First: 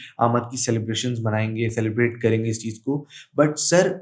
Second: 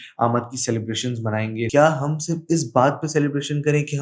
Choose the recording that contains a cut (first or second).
second